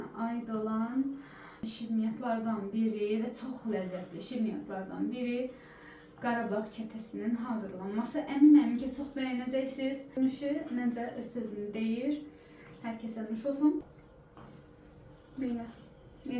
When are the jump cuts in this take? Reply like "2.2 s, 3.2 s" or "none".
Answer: 1.7 s, 10.2 s, 13.8 s